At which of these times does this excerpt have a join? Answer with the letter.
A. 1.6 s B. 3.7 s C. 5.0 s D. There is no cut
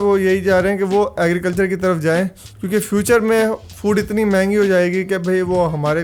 D